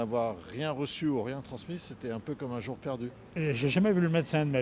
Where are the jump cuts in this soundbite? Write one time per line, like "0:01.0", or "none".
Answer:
0:03.2